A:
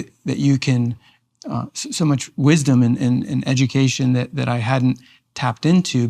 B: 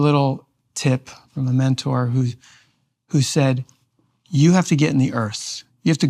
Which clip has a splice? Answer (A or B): B